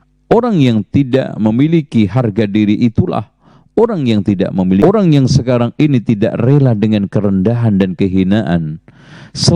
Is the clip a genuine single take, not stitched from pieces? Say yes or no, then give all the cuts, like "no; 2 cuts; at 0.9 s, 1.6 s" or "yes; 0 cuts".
no; 1 cut; at 4.8 s